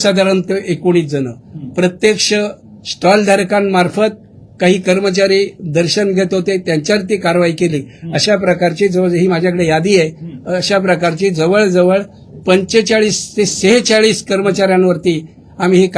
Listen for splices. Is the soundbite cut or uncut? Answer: uncut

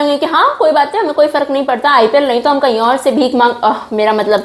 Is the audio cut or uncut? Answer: uncut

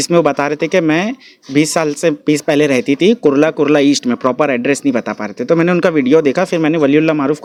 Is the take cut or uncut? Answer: uncut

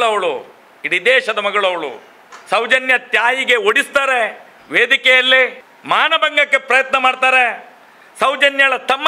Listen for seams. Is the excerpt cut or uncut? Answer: cut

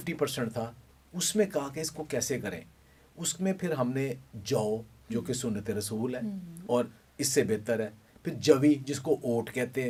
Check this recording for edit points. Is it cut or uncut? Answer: uncut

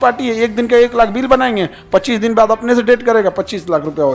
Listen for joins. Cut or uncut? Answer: uncut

